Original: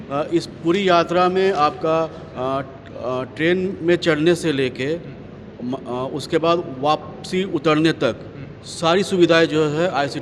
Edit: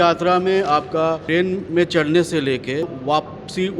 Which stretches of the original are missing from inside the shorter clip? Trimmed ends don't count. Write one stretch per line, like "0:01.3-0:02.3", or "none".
0:02.1-0:03.3
0:05.1-0:06.7